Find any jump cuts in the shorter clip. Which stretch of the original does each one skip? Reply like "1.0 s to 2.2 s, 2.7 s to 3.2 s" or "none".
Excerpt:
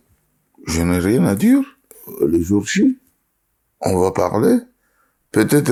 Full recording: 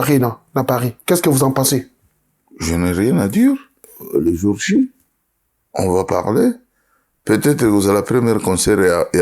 none